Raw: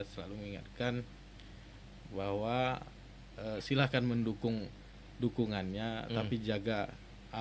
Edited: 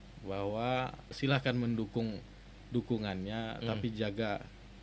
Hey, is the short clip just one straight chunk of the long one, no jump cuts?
no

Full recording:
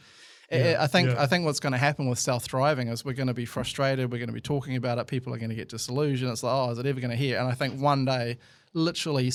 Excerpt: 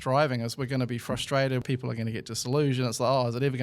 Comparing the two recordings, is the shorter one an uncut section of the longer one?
no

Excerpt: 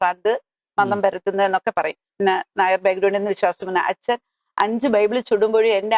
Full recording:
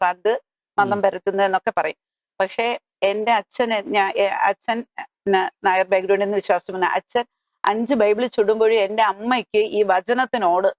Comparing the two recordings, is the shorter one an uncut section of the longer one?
no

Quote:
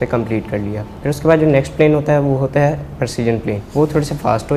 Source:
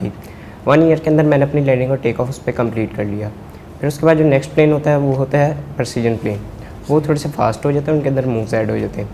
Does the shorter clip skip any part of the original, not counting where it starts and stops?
yes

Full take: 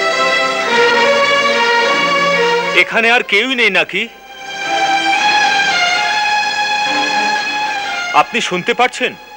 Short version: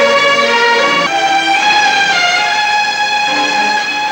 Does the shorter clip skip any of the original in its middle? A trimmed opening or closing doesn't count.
yes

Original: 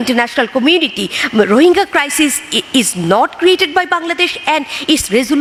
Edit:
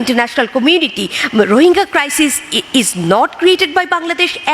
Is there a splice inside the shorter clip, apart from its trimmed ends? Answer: no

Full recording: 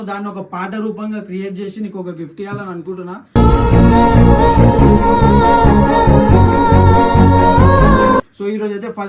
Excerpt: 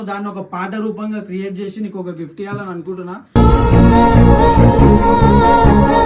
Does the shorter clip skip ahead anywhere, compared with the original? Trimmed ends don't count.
no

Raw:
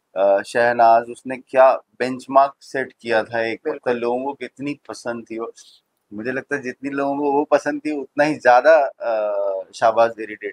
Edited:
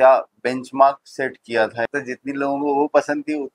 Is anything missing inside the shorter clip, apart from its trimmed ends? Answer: yes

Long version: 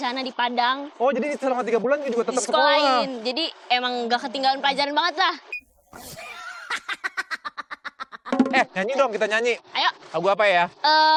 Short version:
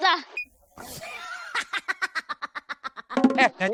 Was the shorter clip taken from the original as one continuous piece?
yes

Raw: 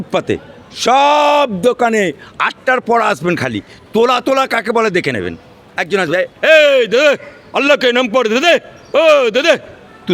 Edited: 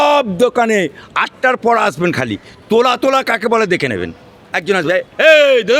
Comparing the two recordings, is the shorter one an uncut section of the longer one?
yes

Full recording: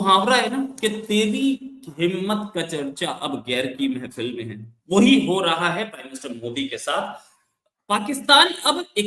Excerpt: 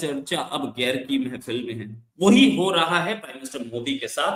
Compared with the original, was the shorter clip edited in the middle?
no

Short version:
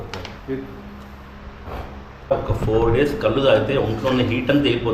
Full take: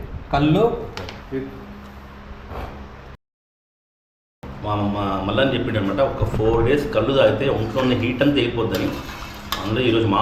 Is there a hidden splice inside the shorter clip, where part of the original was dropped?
yes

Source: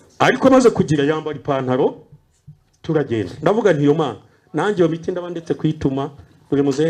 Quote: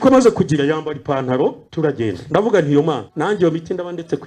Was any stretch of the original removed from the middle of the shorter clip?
yes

